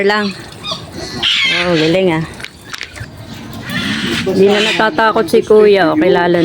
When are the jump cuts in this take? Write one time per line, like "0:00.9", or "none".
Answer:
0:03.1